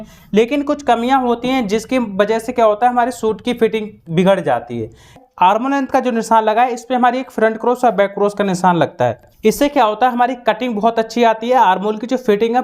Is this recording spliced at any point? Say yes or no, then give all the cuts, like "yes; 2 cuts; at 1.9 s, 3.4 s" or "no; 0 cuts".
yes; 2 cuts; at 5.2 s, 9.3 s